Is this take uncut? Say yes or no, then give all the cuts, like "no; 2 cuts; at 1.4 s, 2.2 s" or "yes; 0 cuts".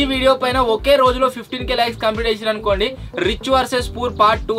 yes; 0 cuts